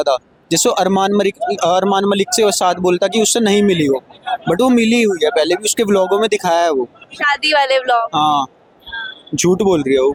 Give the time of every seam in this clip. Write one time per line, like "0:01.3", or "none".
none